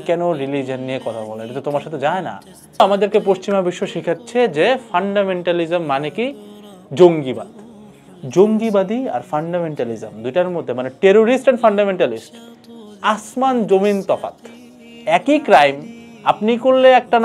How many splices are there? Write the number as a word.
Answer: two